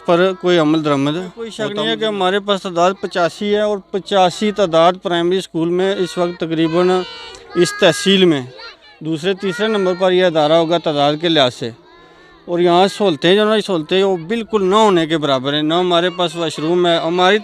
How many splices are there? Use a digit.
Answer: 1